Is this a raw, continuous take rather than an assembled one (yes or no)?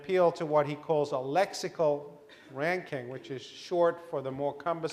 yes